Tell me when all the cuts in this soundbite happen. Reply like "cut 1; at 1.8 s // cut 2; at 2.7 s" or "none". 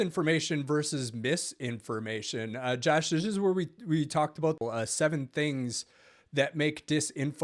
cut 1; at 4.6 s

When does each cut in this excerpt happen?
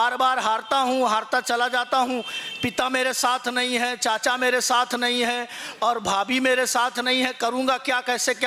none

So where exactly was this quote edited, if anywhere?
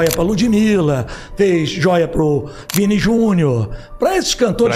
none

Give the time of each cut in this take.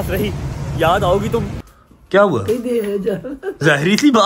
cut 1; at 1.6 s

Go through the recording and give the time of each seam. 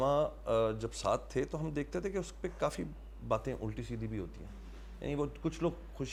none

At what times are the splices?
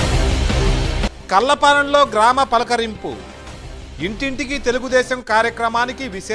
cut 1; at 1.0 s

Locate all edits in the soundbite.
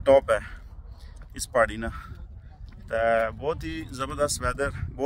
none

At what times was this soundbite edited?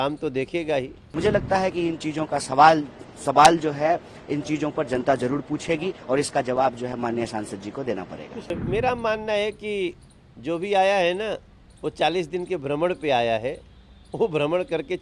cut 1; at 1.0 s // cut 2; at 8.5 s

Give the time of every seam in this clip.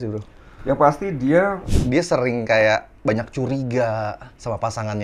cut 1; at 1.6 s

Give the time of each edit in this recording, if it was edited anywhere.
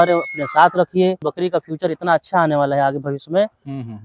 cut 1; at 1.3 s

